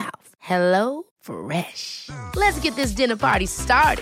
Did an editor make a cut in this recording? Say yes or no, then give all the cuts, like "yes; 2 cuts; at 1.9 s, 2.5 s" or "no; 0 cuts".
no; 0 cuts